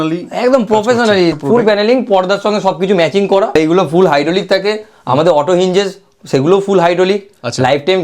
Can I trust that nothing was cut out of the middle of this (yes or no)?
no